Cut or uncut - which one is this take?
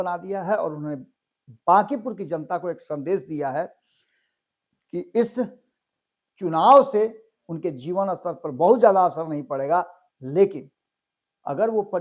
uncut